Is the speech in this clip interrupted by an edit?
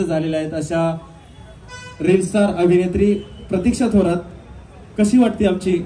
no; 0 cuts

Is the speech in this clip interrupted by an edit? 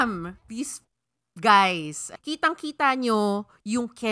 yes; 1 cut; at 2.1 s

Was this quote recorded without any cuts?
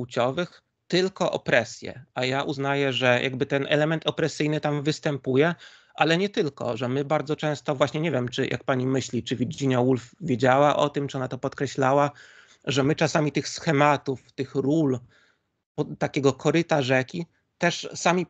yes; 0 cuts

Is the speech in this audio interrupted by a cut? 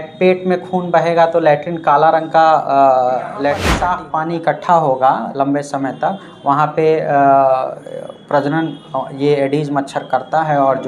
yes; 1 cut; at 3.7 s

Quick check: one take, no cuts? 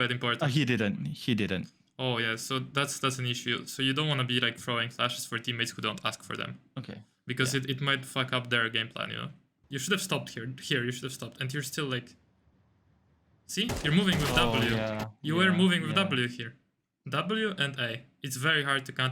no; 2 cuts; at 9.6 s, 17.0 s

